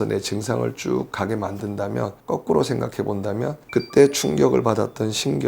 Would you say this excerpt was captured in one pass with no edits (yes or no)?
no